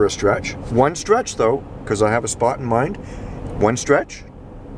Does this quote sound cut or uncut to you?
uncut